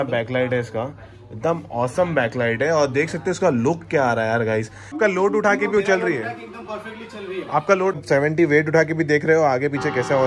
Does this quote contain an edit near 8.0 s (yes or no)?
yes